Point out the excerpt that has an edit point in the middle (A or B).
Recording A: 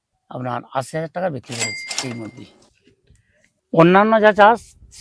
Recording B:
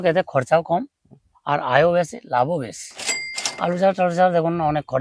A